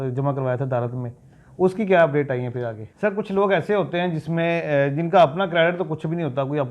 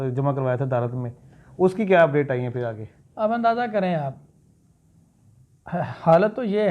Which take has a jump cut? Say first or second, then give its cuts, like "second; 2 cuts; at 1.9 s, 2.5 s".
first; 1 cut; at 2.8 s